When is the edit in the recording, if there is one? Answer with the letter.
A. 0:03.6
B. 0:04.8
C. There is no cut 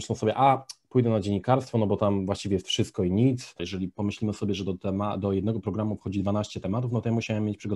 A